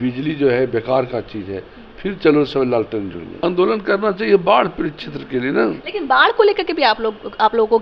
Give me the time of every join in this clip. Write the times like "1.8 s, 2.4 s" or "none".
3.4 s